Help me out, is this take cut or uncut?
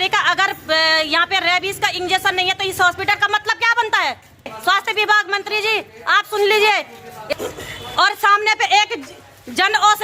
cut